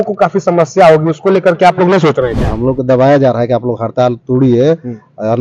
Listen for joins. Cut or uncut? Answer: cut